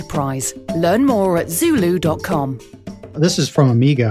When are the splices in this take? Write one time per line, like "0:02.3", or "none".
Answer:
0:03.1